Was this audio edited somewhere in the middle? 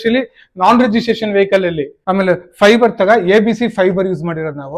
yes; 1 cut; at 1.9 s

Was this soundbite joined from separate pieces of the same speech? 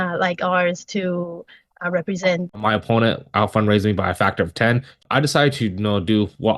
yes; 2 cuts; at 2.5 s, 5.0 s

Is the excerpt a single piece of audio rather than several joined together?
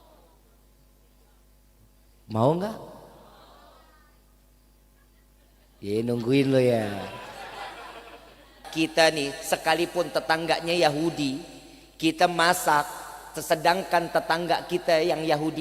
no; 1 cut; at 8.5 s

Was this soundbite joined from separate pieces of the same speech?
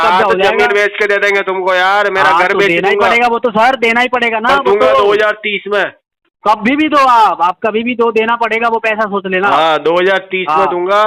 no; 0 cuts

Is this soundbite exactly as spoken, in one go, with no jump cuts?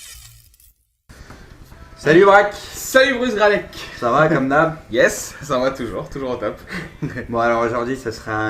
no; 1 cut; at 1.9 s

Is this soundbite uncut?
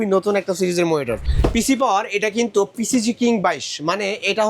no; 1 cut; at 1.2 s

